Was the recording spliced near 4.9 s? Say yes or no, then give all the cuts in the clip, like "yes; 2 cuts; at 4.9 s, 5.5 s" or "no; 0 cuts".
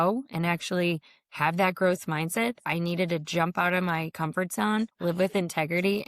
yes; 1 cut; at 4.9 s